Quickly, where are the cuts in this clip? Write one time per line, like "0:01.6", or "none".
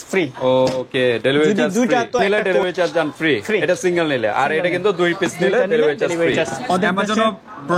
0:02.2
0:06.6